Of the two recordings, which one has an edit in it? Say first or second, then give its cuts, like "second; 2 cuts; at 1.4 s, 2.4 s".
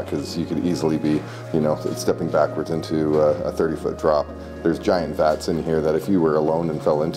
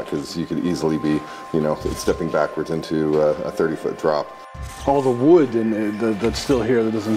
second; 1 cut; at 4.5 s